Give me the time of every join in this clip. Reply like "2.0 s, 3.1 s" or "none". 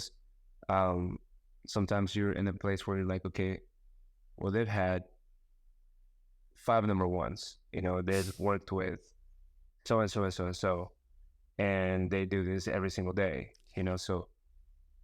none